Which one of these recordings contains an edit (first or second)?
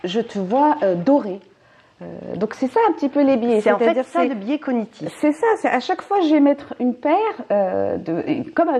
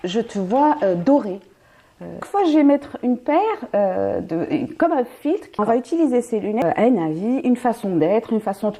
second